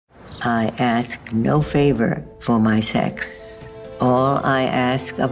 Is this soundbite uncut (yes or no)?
yes